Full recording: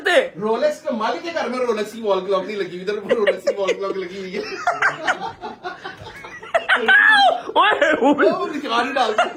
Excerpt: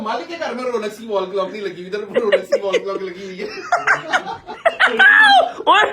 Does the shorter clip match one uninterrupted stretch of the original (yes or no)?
no